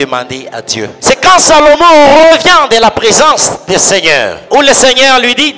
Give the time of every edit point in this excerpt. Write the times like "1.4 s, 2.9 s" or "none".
0.9 s, 4.4 s